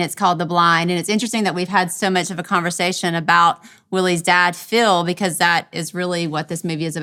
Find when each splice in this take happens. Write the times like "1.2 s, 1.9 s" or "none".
none